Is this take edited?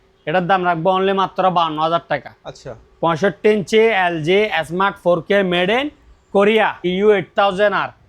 yes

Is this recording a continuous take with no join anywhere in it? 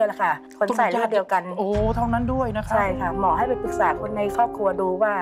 yes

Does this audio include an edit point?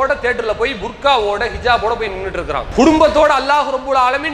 yes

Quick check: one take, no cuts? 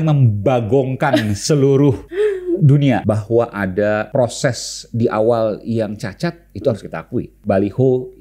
no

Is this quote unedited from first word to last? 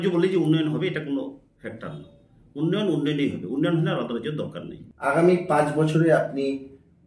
yes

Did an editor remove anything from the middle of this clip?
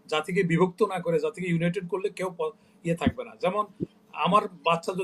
no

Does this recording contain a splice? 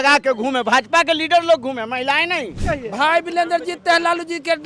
yes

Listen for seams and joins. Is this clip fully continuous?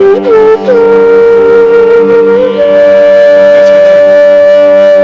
yes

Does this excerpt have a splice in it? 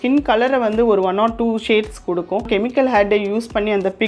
yes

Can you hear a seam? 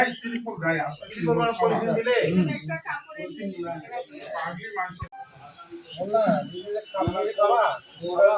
no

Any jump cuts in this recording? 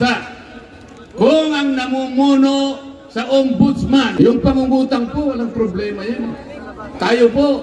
yes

